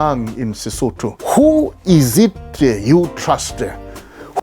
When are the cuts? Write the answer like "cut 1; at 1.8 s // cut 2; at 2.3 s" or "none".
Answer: cut 1; at 1.1 s